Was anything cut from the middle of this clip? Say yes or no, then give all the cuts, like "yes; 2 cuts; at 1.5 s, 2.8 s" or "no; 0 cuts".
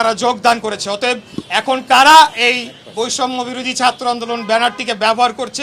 no; 0 cuts